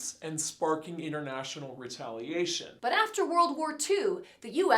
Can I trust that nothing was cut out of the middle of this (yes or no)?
no